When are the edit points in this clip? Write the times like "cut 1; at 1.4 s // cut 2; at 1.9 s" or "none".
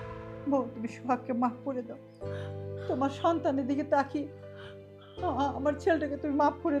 none